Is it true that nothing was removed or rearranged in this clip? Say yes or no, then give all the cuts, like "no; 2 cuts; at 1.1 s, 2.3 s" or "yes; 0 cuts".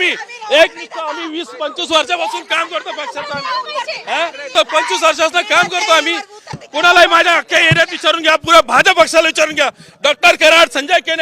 no; 1 cut; at 4.5 s